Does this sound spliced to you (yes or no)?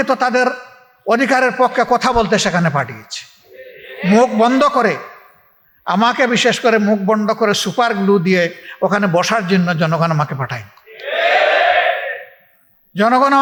no